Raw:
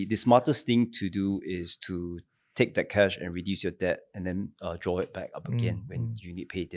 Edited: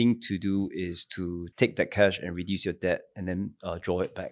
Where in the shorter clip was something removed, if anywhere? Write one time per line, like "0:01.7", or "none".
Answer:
0:01.4